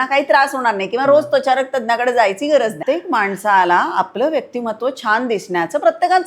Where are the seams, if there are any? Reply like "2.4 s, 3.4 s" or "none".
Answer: 2.8 s